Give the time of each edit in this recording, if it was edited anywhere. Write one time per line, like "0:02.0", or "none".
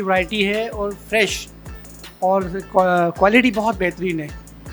0:01.7

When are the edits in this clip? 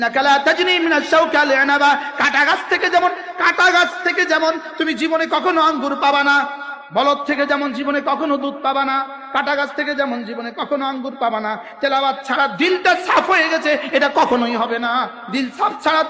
0:15.2

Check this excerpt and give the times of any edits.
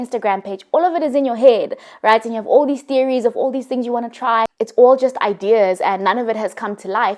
0:04.6

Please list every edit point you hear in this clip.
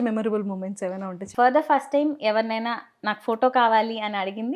0:01.2

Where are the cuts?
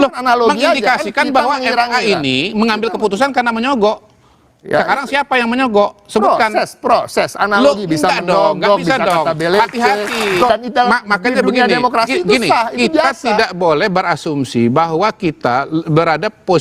0:10.5

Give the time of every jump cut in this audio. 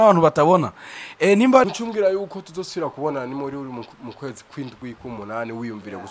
0:01.7

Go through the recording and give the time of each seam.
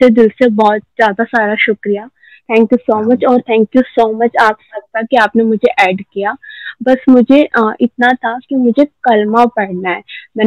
none

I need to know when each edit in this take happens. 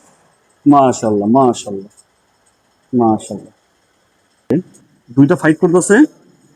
0:04.5

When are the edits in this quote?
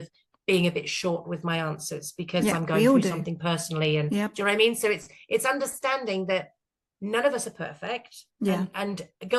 none

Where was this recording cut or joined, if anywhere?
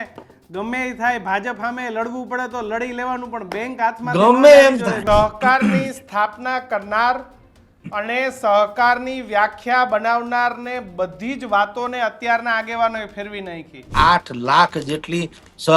0:05.0
0:13.9

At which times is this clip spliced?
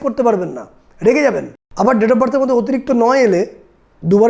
0:01.6

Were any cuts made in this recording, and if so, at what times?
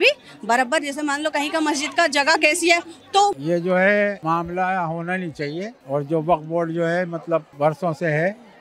0:03.3
0:04.2
0:05.8
0:07.5

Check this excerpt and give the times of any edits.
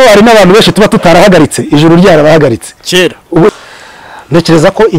0:03.5

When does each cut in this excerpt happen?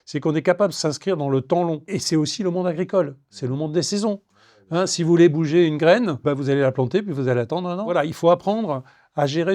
0:01.9
0:06.2
0:07.9

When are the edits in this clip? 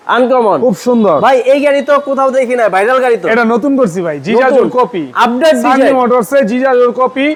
none

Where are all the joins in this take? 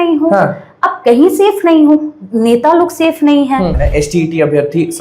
0:03.8

